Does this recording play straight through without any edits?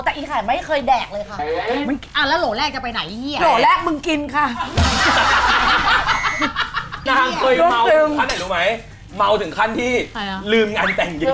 no; 2 cuts; at 7.0 s, 10.2 s

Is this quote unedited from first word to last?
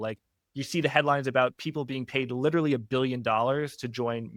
yes; 0 cuts

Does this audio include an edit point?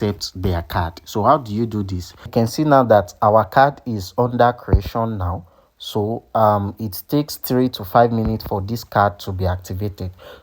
yes; 1 cut; at 2.3 s

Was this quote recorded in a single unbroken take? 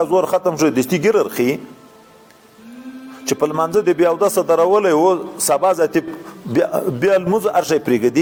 yes; 0 cuts

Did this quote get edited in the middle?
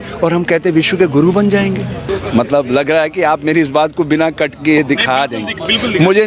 yes; 1 cut; at 2.0 s

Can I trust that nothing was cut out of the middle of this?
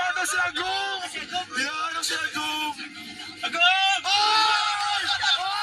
yes; 0 cuts

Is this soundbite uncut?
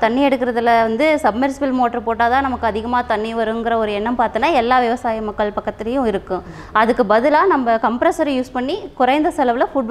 yes; 0 cuts

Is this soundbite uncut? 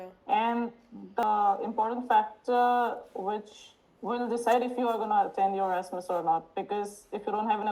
no; 1 cut; at 1.2 s

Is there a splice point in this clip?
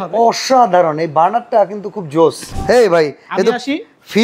yes; 1 cut; at 2.5 s

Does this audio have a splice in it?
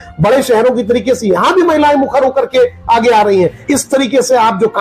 yes; 1 cut; at 3.6 s

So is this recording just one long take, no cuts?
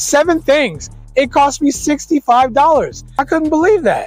no; 1 cut; at 3.1 s

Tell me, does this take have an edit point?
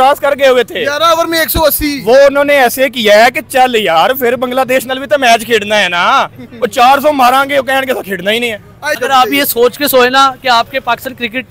yes; 1 cut; at 9.0 s

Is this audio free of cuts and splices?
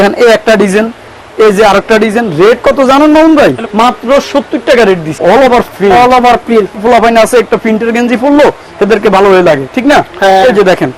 no; 3 cuts; at 3.6 s, 5.2 s, 6.7 s

